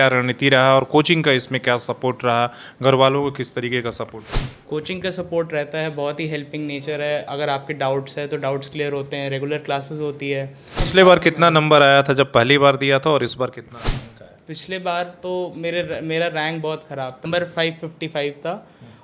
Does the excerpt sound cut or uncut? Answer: cut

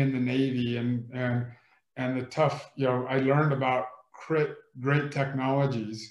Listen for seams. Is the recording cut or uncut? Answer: uncut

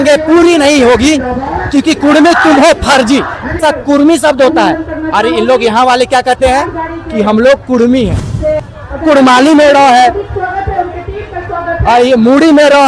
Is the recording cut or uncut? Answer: cut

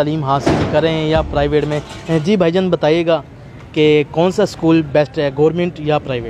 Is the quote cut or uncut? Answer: uncut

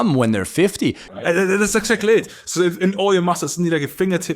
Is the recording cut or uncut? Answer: cut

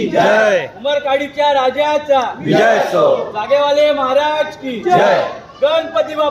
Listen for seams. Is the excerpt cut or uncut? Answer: uncut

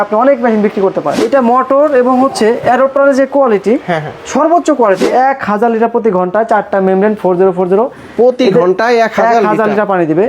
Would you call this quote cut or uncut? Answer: cut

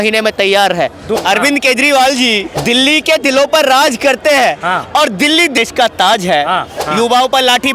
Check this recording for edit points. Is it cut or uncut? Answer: cut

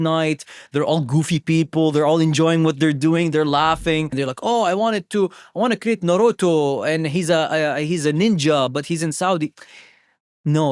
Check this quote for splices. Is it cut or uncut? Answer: cut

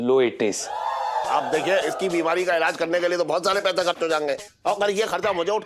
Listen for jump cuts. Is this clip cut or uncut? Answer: cut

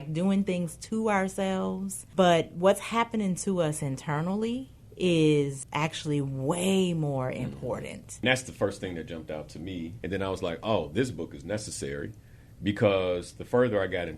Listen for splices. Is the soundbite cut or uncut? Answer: cut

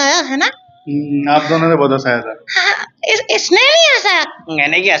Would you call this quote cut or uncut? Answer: uncut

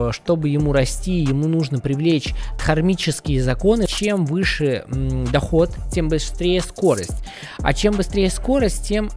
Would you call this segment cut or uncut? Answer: cut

